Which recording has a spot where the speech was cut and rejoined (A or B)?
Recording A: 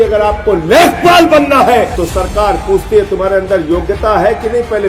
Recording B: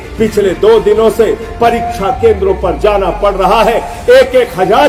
A